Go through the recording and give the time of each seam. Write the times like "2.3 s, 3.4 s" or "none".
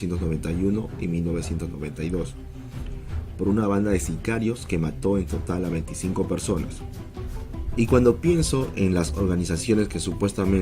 9.2 s